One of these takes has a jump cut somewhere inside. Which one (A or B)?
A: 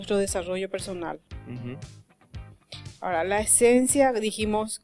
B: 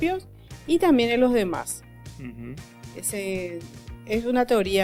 A